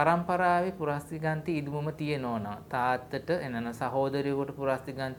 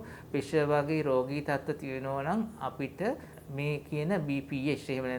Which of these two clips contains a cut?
second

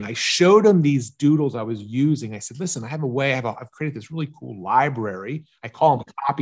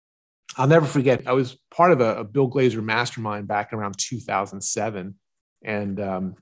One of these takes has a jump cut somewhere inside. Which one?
second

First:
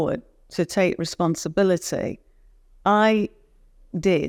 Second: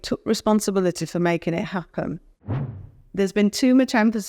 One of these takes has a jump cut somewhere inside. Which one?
second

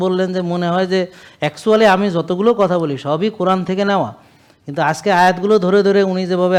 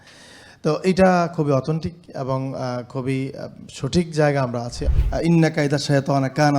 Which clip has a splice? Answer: second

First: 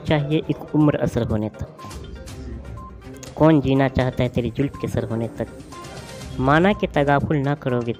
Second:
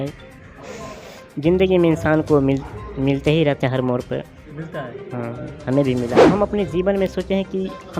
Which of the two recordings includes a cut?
second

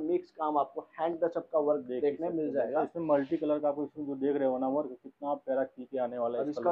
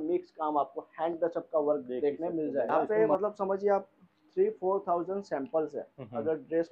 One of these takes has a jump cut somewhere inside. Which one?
second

